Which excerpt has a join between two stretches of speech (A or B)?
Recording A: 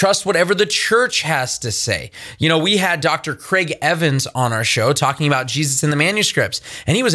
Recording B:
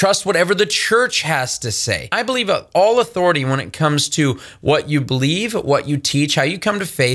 B